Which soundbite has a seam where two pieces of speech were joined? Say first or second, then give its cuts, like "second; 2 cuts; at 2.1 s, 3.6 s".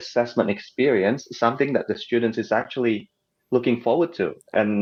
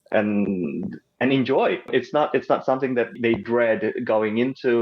second; 2 cuts; at 1.9 s, 3.1 s